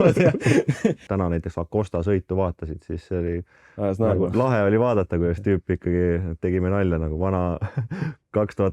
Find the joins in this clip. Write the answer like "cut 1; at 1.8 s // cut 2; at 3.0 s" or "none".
cut 1; at 1.0 s